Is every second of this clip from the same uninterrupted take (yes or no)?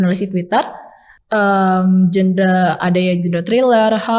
yes